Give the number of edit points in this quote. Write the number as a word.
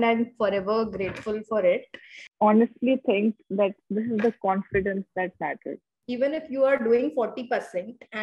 one